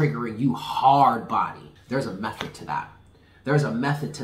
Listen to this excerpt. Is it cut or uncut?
cut